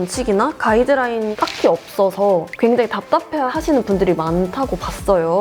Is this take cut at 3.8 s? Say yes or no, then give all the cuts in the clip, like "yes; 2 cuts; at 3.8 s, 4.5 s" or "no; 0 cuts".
no; 1 cut; at 1.3 s